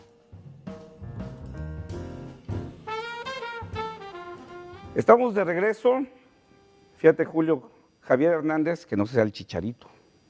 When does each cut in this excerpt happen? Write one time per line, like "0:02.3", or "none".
0:04.4